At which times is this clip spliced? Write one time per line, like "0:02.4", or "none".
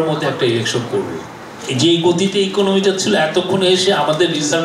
0:01.5